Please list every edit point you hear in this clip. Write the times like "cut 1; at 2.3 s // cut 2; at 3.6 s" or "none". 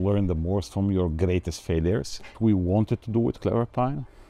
cut 1; at 2.4 s